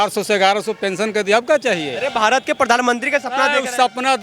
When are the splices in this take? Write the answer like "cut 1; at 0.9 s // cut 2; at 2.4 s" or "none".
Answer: cut 1; at 1.9 s